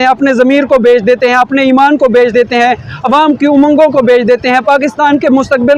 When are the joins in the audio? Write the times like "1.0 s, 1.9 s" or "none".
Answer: none